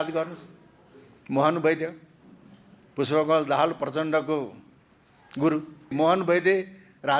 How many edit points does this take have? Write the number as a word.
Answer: one